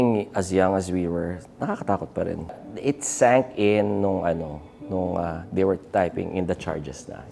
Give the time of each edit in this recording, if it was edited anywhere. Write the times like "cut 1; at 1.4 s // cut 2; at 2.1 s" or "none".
cut 1; at 2.7 s